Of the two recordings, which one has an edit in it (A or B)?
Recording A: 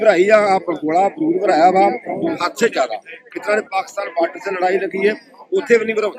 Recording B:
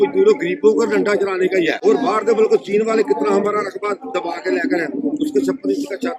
B